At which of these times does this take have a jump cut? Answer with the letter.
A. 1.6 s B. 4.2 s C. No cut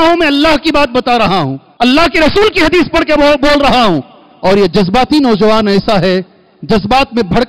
A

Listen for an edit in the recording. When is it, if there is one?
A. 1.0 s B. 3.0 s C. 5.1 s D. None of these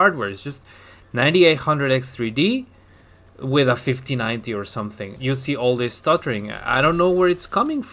C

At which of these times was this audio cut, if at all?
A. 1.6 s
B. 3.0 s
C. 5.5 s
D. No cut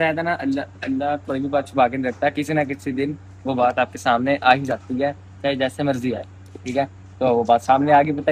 D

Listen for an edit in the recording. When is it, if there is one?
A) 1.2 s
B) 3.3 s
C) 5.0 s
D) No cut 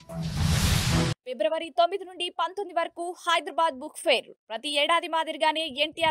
A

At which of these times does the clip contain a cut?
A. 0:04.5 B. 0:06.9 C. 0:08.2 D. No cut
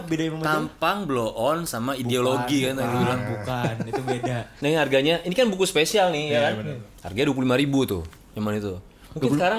A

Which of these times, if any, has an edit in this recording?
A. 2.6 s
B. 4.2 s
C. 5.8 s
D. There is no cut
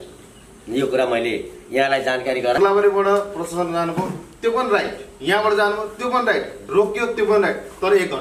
A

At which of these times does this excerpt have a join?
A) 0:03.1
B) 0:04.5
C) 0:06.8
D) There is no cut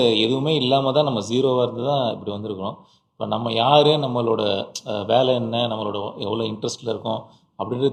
D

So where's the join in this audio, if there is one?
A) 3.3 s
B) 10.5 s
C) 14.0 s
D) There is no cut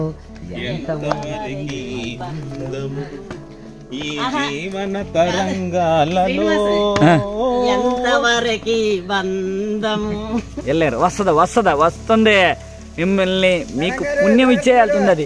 B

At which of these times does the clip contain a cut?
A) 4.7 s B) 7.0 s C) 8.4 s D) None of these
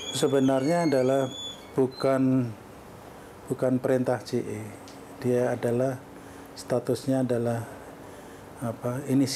D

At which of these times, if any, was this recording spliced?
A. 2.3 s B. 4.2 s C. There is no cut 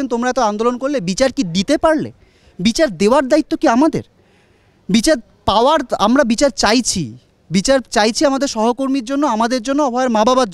C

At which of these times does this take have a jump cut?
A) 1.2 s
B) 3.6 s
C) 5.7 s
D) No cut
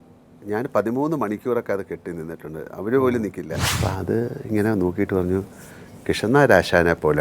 B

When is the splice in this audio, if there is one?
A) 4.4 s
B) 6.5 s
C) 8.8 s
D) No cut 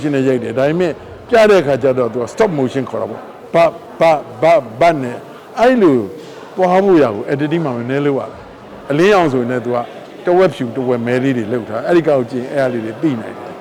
C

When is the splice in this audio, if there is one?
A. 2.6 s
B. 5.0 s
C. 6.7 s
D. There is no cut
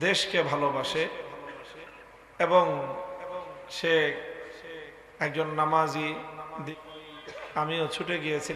C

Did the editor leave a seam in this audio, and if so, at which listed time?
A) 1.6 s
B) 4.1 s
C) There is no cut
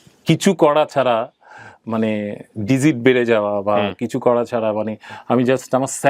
C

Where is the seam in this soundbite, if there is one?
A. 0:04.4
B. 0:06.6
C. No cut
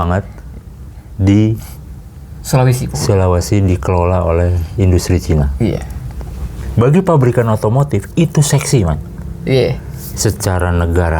B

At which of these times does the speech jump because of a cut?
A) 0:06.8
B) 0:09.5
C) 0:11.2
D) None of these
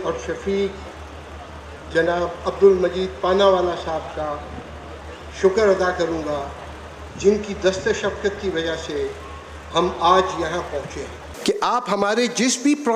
C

